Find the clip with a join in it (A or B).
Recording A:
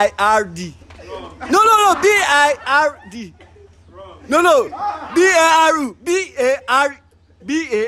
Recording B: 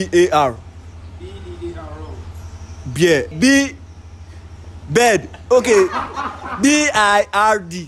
B